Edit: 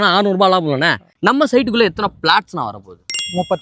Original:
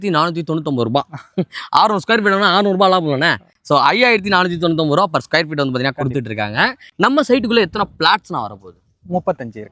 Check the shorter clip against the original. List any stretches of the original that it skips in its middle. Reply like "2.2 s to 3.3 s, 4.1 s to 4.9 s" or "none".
3.5 s to 6.8 s